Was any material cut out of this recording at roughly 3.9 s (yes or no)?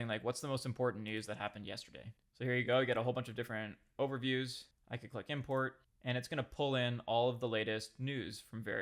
no